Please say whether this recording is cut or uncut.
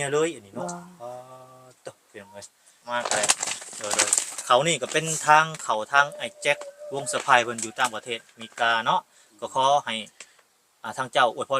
cut